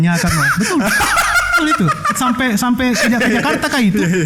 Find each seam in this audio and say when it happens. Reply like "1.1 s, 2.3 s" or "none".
none